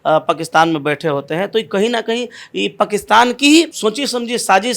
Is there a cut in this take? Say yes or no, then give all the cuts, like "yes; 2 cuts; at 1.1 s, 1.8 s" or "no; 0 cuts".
no; 0 cuts